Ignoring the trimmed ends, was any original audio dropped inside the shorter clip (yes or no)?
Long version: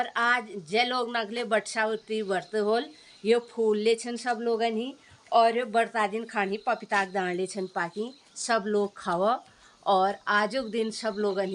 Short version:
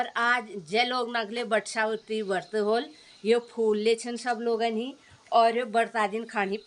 no